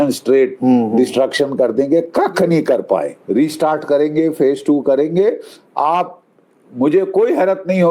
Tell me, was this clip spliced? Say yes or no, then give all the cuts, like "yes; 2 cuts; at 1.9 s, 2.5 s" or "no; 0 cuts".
yes; 1 cut; at 3.2 s